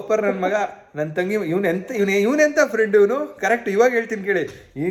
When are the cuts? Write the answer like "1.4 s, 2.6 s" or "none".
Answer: none